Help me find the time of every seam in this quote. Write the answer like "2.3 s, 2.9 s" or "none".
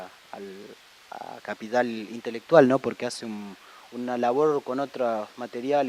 none